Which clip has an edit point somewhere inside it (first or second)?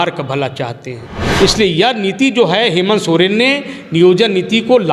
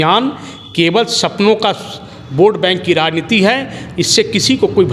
first